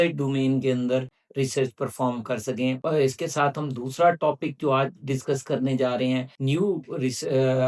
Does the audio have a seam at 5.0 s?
no; 2 cuts; at 2.8 s, 6.3 s

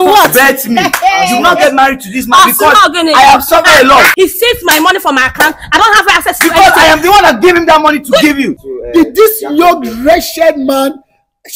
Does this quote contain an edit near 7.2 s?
no; 2 cuts; at 4.1 s, 8.5 s

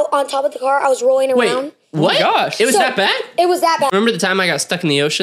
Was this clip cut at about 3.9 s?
yes; 1 cut; at 3.9 s

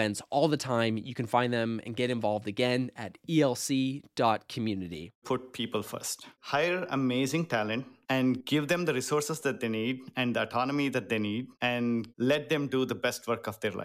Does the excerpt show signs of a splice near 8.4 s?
yes; 4 cuts; at 5.2 s, 6.3 s, 8.4 s, 11.7 s

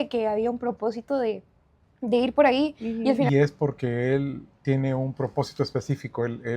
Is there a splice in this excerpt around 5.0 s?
no; 1 cut; at 3.3 s

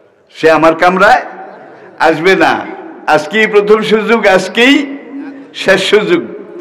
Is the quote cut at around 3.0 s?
no; 0 cuts

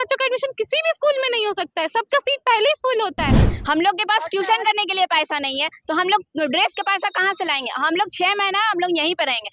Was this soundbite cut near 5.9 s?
no; 1 cut; at 3.5 s

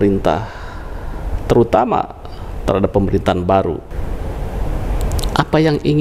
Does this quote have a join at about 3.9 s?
yes; 1 cut; at 3.9 s

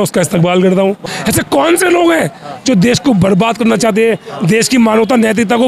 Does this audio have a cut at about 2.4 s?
no; 1 cut; at 1.1 s

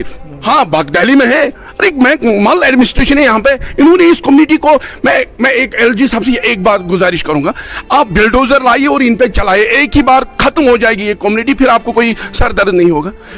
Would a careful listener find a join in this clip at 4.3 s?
no; 0 cuts

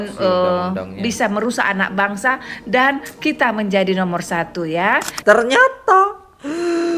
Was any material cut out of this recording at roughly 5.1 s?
yes; 1 cut; at 5.1 s

